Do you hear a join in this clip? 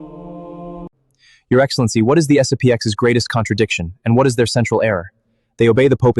yes; 1 cut; at 0.9 s

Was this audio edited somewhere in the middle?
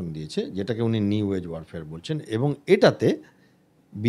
no; 0 cuts

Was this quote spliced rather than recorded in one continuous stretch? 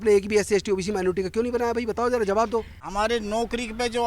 yes; 1 cut; at 2.9 s

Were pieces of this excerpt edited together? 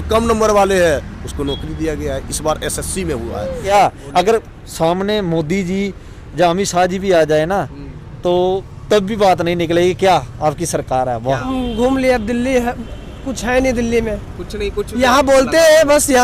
yes; 2 cuts; at 3.7 s, 11.5 s

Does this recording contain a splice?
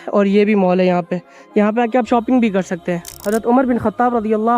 yes; 1 cut; at 3.2 s

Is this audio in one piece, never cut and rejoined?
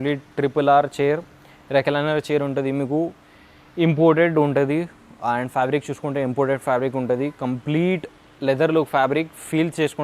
yes; 0 cuts

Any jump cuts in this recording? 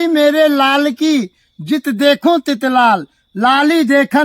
no; 0 cuts

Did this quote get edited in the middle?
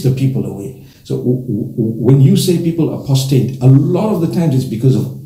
no; 0 cuts

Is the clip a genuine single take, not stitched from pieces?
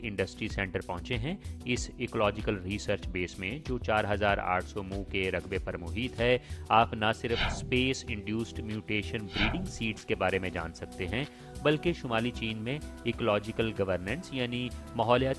yes; 0 cuts

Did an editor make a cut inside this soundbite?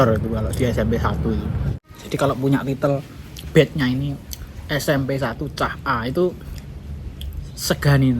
yes; 1 cut; at 1.7 s

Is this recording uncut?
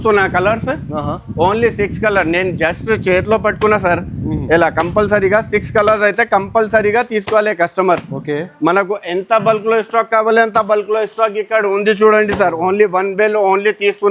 yes; 0 cuts

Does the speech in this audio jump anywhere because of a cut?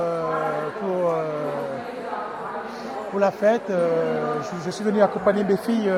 no; 0 cuts

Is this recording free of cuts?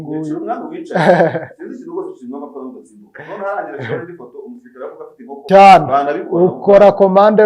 no; 1 cut; at 5.4 s

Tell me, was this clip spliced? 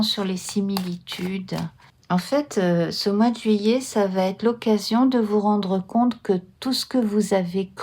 yes; 1 cut; at 1.9 s

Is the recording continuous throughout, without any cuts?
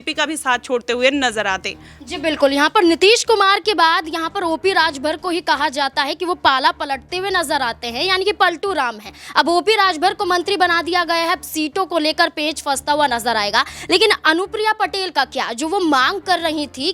yes; 0 cuts

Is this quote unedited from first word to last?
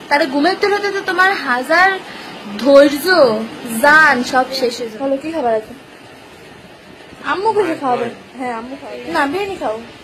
no; 2 cuts; at 4.8 s, 8.6 s

